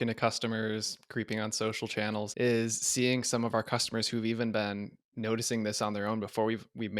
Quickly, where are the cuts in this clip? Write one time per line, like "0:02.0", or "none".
0:02.3

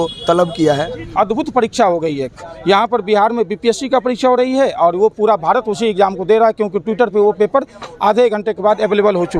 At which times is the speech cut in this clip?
0:01.1

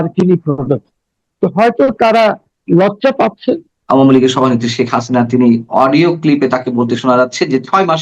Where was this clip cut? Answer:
0:03.7

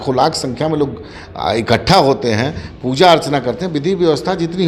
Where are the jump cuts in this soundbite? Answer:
none

